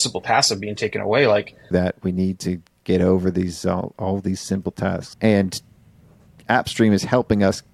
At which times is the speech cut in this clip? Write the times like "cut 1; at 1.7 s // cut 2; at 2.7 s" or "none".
cut 1; at 1.7 s // cut 2; at 5.1 s // cut 3; at 6.3 s